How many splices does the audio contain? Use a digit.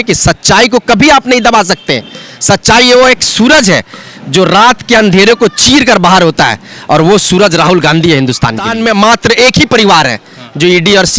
1